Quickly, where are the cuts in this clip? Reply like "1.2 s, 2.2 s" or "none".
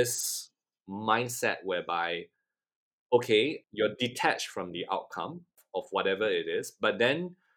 none